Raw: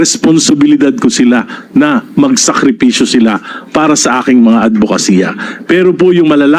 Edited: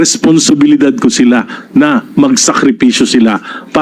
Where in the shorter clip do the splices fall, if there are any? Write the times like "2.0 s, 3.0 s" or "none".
none